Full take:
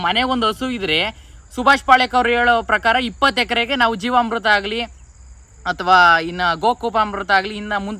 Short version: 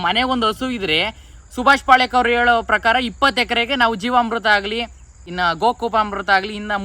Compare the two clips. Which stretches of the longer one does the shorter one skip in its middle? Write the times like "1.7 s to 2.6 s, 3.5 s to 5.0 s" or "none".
5.3 s to 6.3 s